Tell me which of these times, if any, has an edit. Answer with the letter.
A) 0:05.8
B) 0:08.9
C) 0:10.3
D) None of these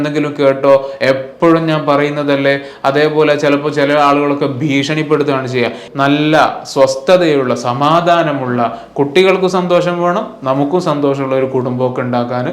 A